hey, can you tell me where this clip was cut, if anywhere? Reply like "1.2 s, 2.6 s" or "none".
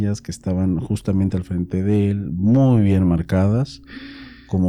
none

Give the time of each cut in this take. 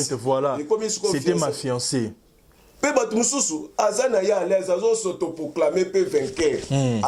none

